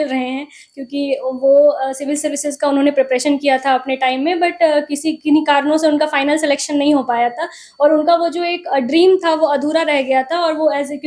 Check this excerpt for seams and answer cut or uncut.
uncut